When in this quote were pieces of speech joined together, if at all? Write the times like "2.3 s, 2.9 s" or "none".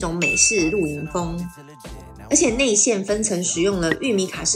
2.1 s